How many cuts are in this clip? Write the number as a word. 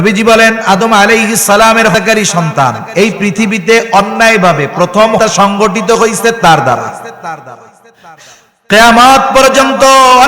two